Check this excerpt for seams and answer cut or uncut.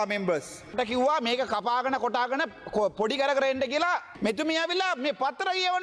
cut